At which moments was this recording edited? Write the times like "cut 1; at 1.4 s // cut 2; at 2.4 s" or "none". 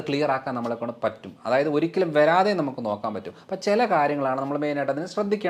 none

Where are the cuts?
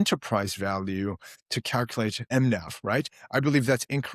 cut 1; at 2.2 s

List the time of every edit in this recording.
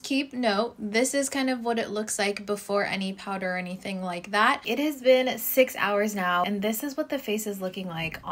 cut 1; at 4.6 s // cut 2; at 6.5 s

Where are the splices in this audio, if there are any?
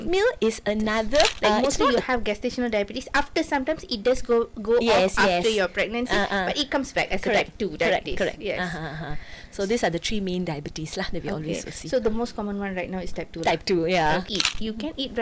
cut 1; at 1.4 s // cut 2; at 14.3 s

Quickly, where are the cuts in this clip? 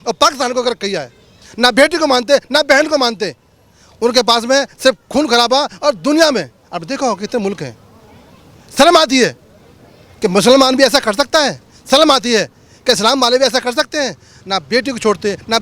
none

